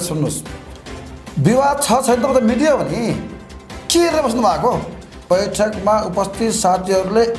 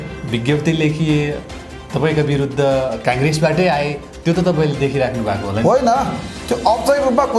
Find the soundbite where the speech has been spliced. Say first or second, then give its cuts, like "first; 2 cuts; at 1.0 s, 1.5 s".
first; 1 cut; at 5.2 s